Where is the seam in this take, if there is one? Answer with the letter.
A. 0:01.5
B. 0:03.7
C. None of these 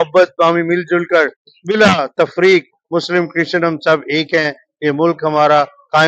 C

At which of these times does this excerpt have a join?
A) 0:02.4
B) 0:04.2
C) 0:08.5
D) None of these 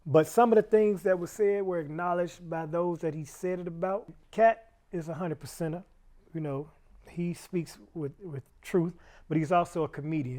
B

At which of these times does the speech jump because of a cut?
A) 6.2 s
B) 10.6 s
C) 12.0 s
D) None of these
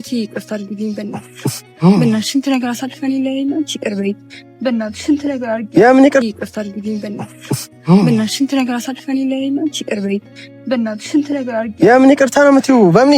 A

